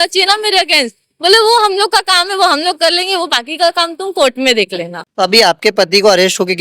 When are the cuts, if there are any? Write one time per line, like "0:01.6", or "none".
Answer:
0:05.0

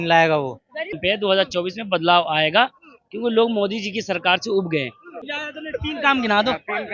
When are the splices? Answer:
0:01.0
0:05.2

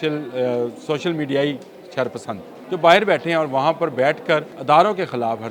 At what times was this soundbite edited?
0:02.5
0:04.5

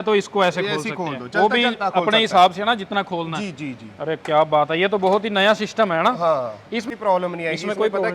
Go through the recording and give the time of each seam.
0:06.9

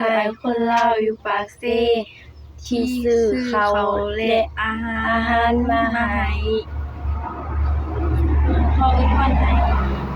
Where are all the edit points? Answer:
none

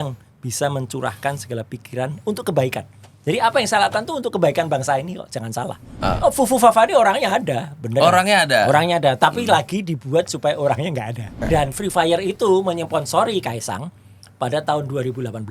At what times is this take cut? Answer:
0:05.9
0:11.3

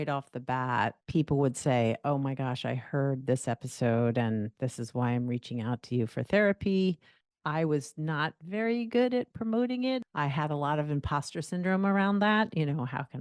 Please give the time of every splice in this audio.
0:01.0
0:10.0

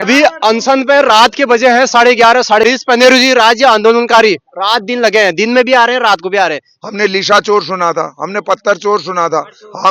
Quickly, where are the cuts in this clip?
0:02.6
0:06.7

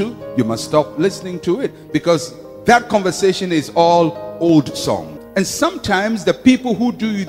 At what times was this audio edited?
none

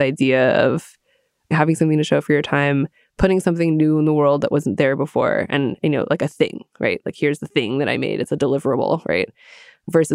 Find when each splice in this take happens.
none

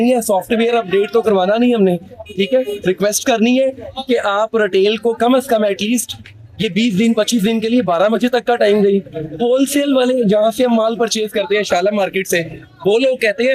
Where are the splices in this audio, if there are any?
none

